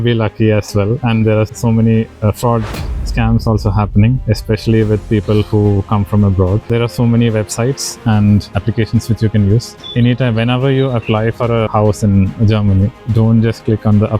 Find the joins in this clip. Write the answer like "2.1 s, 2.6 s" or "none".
1.5 s, 4.2 s, 6.7 s, 8.5 s, 9.8 s, 11.7 s